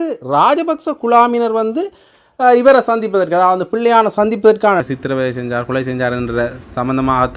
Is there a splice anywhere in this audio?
yes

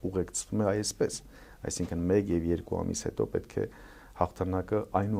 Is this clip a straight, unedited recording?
yes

